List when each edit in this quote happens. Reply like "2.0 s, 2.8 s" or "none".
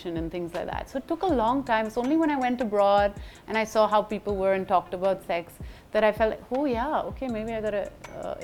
none